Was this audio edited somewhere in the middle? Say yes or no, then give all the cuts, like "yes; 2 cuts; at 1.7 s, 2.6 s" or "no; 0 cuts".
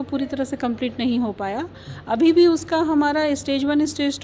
no; 0 cuts